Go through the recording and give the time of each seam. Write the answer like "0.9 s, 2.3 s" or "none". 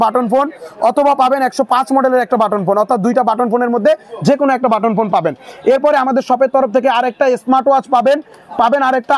none